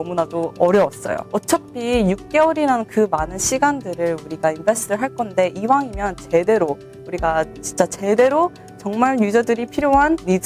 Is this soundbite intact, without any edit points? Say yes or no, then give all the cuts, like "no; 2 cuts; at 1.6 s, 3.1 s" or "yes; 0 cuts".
yes; 0 cuts